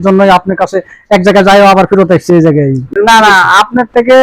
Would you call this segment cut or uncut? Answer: cut